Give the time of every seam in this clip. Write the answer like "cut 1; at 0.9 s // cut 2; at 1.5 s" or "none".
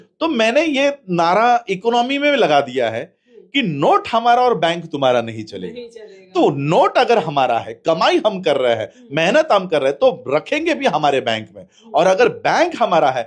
none